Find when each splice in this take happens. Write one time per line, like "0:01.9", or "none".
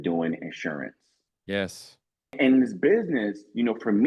0:02.4